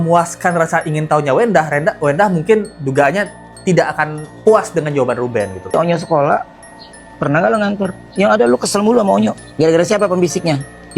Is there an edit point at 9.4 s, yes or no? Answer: yes